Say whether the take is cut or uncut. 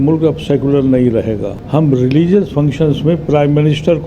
cut